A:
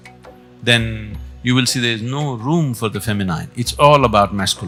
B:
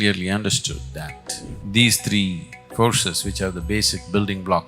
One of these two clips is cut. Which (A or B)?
B